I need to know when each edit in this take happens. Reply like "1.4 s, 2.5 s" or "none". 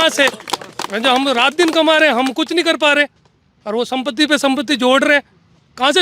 none